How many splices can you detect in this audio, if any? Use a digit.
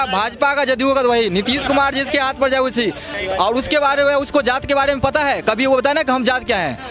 1